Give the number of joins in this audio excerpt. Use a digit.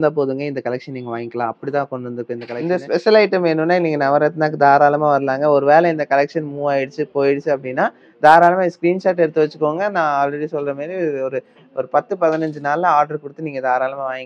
1